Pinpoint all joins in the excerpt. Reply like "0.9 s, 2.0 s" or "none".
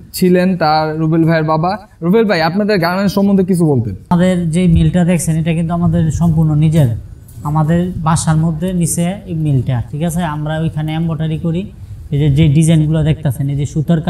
none